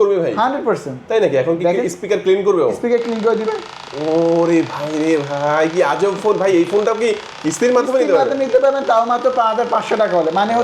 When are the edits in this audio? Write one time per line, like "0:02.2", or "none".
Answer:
none